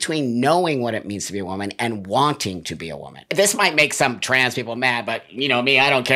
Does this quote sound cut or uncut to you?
cut